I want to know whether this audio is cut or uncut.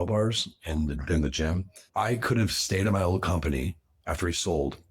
cut